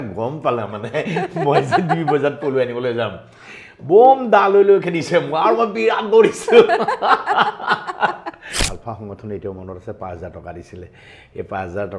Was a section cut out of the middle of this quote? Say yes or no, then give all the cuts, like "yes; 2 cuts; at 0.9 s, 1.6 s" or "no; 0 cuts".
yes; 1 cut; at 8.7 s